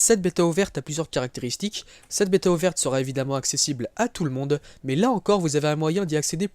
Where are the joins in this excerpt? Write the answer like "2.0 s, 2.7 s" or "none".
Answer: 1.8 s